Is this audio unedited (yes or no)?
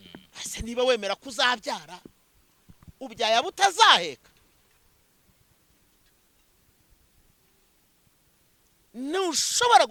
yes